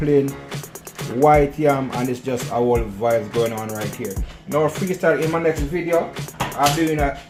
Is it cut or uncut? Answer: uncut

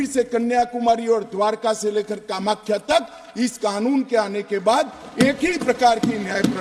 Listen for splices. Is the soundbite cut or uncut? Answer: uncut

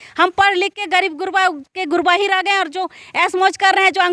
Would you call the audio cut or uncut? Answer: uncut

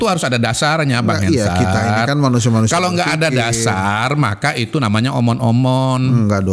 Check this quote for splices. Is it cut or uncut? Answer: uncut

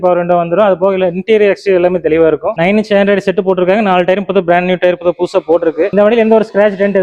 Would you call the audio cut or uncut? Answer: uncut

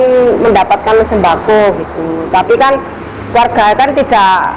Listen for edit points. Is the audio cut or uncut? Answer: uncut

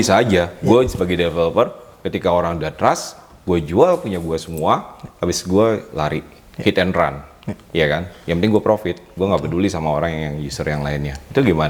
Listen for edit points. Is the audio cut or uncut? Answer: uncut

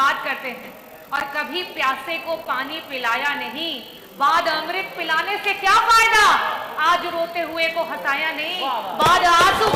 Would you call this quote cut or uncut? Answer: uncut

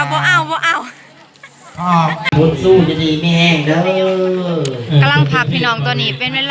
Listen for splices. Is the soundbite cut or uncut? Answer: cut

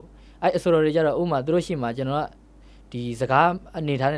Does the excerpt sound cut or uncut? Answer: uncut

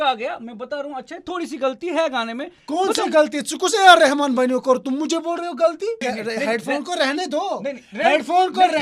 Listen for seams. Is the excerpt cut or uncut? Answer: cut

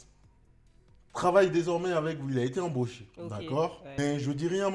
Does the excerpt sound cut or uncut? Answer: cut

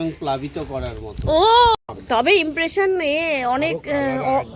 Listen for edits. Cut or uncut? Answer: cut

